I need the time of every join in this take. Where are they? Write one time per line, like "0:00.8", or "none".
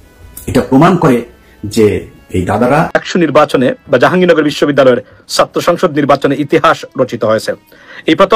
0:02.9